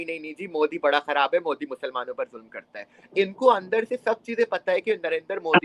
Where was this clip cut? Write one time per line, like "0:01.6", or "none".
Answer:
none